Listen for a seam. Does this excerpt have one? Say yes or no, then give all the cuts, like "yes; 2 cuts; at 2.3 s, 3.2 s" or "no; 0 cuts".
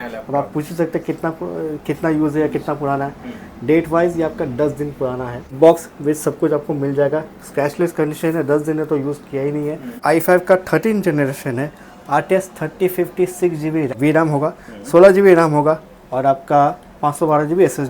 yes; 3 cuts; at 5.5 s, 9.9 s, 13.9 s